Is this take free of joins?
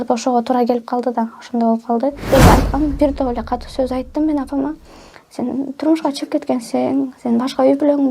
no; 1 cut; at 2.3 s

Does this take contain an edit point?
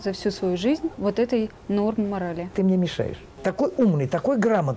yes; 2 cuts; at 0.9 s, 2.8 s

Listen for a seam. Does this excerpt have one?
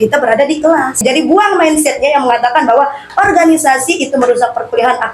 yes; 1 cut; at 1.0 s

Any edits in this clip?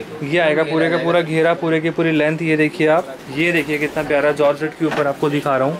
yes; 1 cut; at 3.2 s

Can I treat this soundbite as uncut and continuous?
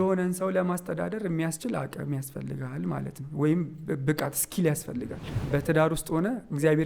no; 1 cut; at 5.4 s

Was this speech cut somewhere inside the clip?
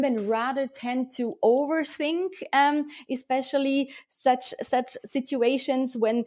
no; 0 cuts

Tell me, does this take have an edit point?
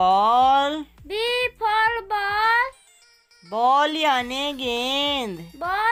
no; 0 cuts

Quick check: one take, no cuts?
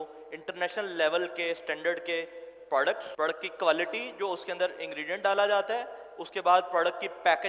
no; 1 cut; at 3.1 s

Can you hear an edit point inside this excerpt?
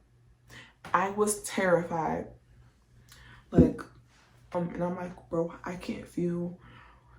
yes; 1 cut; at 4.5 s

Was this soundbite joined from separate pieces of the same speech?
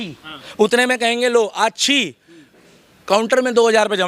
no; 0 cuts

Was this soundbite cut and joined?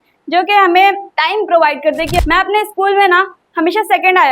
yes; 2 cuts; at 1.1 s, 2.2 s

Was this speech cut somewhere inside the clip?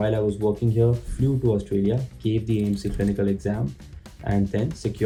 no; 0 cuts

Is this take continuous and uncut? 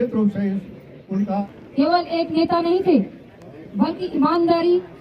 no; 1 cut; at 1.5 s

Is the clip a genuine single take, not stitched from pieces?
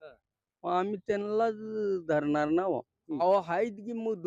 no; 1 cut; at 3.2 s

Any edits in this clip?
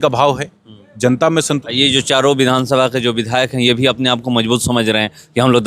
yes; 1 cut; at 1.6 s

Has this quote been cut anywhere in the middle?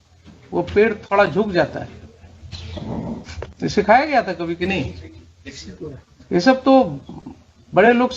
yes; 1 cut; at 3.5 s

